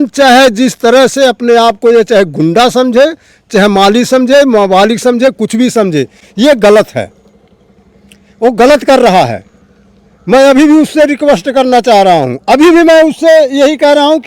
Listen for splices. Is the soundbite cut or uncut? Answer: uncut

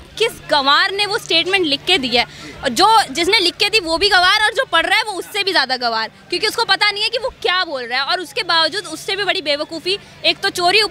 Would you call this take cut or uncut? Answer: uncut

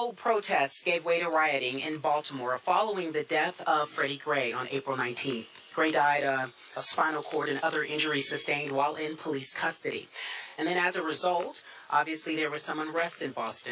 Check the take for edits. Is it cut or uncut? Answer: uncut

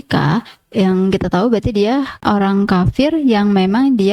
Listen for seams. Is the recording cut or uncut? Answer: uncut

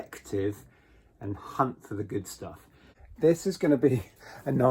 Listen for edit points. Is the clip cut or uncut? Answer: cut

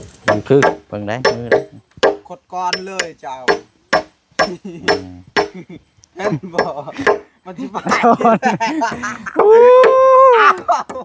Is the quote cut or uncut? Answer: uncut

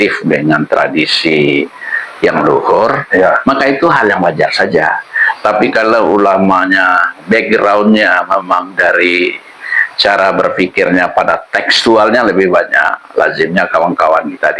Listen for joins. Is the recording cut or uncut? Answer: uncut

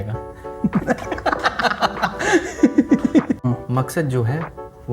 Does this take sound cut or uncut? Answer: cut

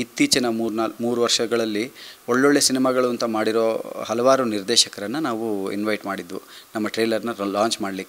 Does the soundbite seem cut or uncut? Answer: uncut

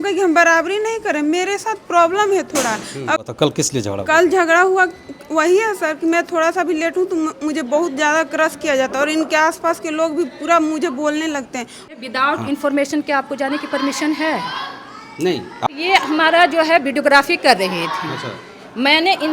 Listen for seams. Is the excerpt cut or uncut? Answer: cut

